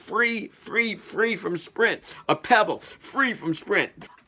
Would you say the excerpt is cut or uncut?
uncut